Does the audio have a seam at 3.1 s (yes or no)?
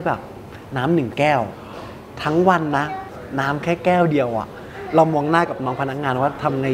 yes